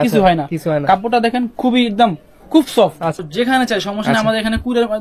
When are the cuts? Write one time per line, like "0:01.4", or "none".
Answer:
0:03.2